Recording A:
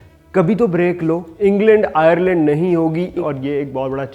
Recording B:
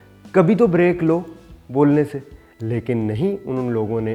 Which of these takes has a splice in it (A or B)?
A